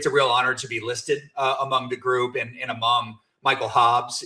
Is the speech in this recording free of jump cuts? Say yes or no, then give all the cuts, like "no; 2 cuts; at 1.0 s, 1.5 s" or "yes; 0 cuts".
yes; 0 cuts